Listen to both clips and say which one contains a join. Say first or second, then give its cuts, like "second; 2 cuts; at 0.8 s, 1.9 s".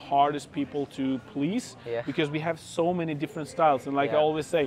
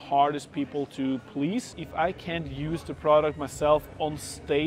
second; 1 cut; at 1.8 s